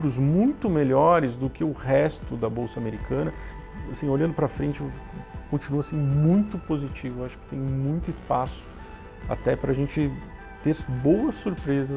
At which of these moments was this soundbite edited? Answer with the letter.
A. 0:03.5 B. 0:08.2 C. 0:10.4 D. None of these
A